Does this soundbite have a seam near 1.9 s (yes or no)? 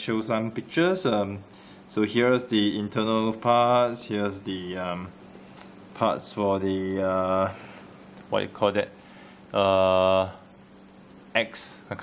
yes